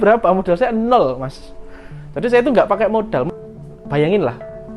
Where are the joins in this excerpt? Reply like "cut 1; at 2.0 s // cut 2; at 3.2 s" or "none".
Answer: cut 1; at 3.2 s